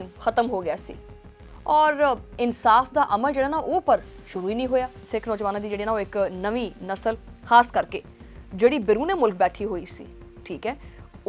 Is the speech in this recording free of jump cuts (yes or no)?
no